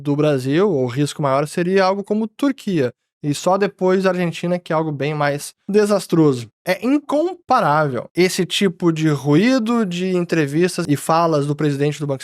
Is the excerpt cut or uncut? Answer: cut